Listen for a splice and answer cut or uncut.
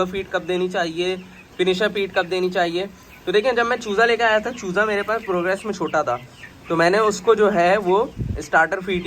uncut